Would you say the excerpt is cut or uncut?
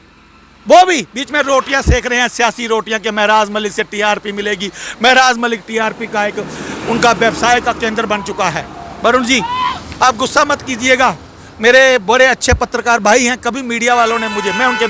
uncut